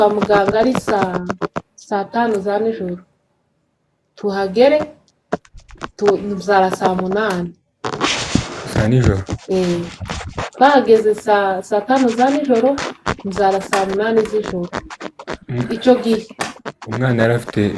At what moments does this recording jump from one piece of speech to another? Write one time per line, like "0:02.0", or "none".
none

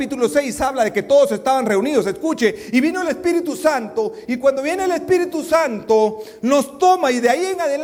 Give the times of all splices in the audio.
none

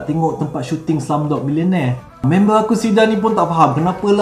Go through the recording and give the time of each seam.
0:02.1

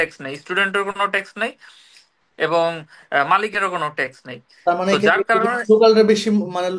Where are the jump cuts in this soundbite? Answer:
none

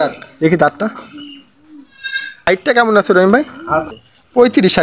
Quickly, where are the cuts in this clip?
0:02.3
0:03.9

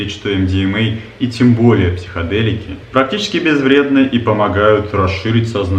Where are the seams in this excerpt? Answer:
none

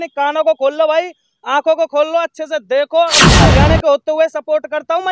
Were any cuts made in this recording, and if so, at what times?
0:03.4

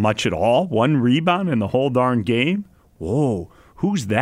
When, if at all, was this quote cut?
none

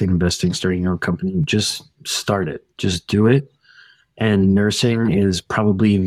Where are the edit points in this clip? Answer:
none

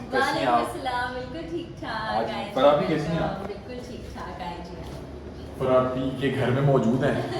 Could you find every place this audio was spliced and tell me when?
none

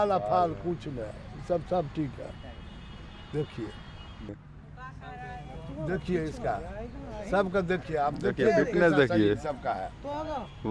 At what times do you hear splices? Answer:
0:04.3

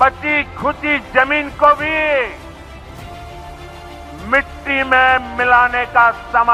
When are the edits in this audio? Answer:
none

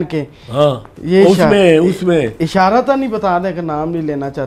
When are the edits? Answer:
none

